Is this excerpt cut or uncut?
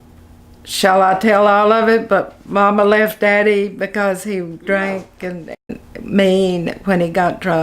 cut